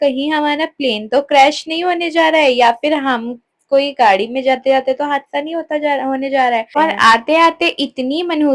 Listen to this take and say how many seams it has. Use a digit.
1